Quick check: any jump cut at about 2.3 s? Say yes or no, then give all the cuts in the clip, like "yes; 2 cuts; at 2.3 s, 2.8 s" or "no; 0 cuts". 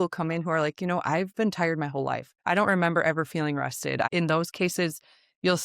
yes; 2 cuts; at 2.3 s, 4.1 s